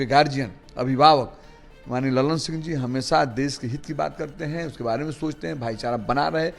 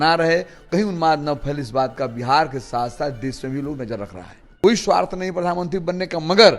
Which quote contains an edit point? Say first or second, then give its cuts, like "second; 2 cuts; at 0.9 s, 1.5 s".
second; 1 cut; at 4.6 s